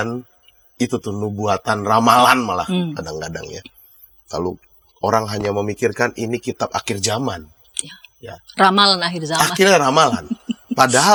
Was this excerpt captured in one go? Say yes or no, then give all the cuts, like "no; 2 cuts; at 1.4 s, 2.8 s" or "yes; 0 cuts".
yes; 0 cuts